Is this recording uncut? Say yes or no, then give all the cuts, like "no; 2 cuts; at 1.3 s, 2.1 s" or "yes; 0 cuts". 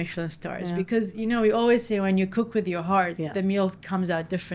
yes; 0 cuts